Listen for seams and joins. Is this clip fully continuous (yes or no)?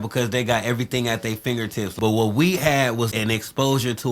no